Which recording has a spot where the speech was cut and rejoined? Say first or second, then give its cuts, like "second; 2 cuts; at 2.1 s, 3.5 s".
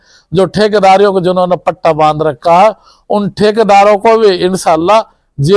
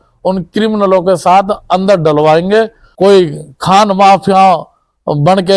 second; 1 cut; at 2.8 s